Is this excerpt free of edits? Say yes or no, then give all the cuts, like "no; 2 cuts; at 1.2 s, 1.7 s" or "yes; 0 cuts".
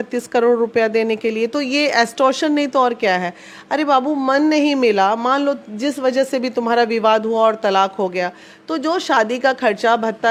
yes; 0 cuts